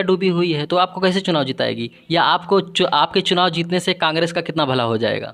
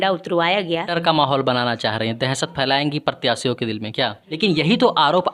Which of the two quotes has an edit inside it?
second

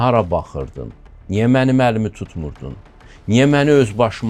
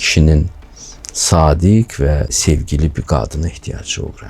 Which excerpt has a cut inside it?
second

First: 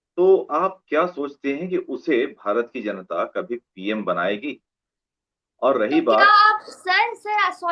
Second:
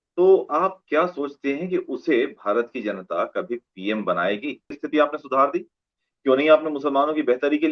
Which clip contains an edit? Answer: second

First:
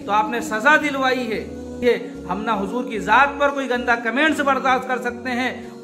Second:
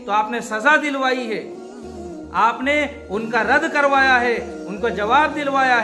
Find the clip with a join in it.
first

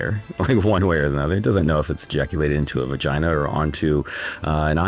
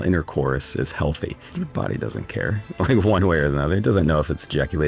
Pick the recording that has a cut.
second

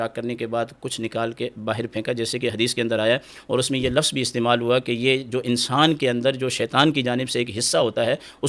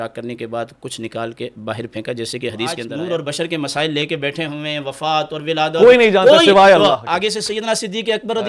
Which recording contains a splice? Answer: second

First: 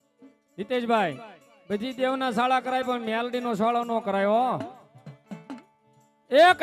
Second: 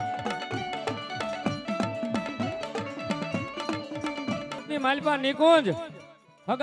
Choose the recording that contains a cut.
second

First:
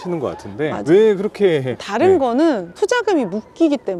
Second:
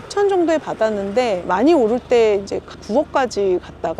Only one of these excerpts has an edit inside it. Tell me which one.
second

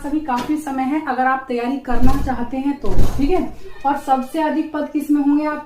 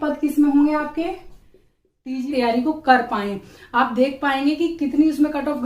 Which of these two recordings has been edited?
second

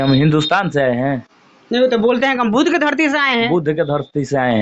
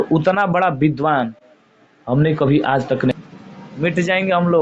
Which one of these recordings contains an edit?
second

